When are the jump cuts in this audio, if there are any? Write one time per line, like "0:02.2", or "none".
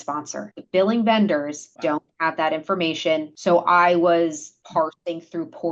0:01.6
0:03.3
0:04.5